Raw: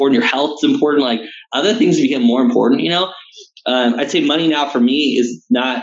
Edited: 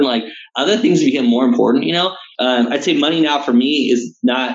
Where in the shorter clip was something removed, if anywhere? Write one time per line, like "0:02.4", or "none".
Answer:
0:02.2